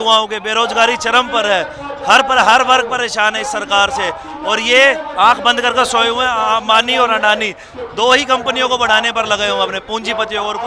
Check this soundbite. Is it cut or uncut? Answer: uncut